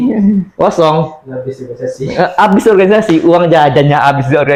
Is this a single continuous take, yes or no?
yes